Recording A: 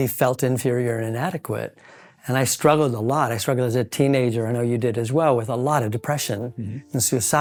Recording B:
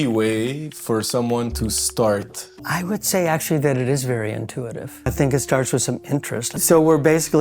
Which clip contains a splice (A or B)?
B